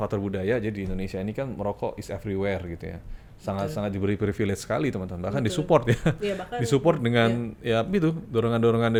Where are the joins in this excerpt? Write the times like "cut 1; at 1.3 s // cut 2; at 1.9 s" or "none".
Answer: none